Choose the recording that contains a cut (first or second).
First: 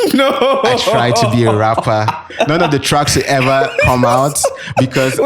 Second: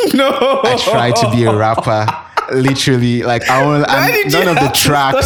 first